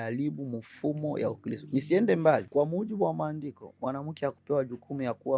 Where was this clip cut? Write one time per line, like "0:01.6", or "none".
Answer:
0:02.5